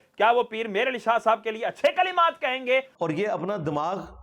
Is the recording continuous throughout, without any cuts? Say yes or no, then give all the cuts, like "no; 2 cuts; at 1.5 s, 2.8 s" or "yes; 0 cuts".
no; 1 cut; at 2.9 s